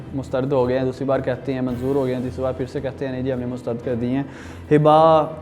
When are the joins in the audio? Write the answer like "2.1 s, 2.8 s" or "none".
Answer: none